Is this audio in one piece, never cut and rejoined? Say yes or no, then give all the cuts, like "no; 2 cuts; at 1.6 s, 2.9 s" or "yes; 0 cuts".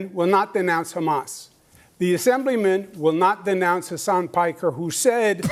yes; 0 cuts